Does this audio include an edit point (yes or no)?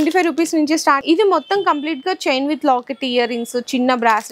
yes